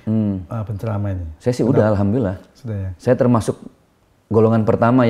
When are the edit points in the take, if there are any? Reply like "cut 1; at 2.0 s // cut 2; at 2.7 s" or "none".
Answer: none

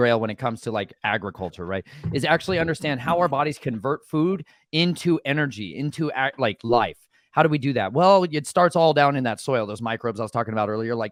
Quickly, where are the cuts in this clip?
none

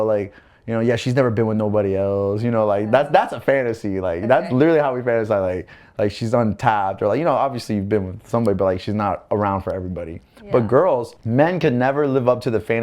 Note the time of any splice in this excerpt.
cut 1; at 11.1 s

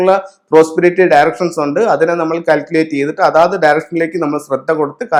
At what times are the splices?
none

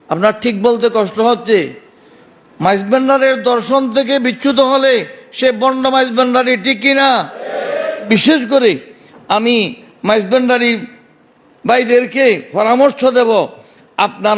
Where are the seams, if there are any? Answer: cut 1; at 8.0 s

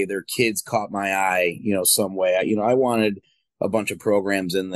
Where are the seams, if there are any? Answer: none

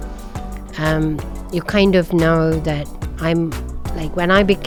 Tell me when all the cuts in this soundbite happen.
none

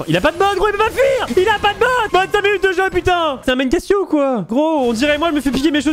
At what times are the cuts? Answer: cut 1; at 1.3 s // cut 2; at 3.4 s // cut 3; at 4.4 s

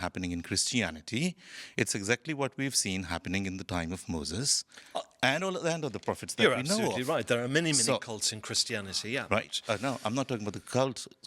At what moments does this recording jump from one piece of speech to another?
none

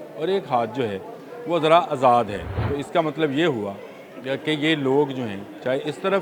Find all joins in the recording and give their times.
cut 1; at 2.5 s

